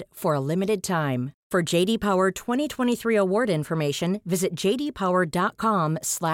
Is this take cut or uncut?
uncut